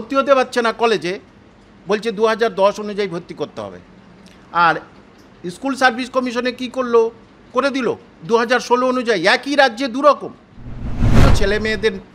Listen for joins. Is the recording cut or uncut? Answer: cut